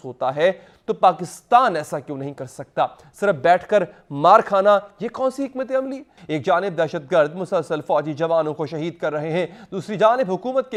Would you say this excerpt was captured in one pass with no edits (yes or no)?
yes